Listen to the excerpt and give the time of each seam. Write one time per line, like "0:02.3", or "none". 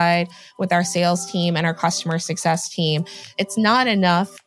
0:03.3